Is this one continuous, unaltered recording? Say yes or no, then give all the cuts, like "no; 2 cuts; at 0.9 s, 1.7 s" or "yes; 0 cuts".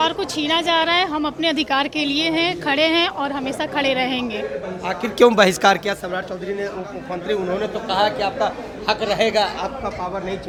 yes; 0 cuts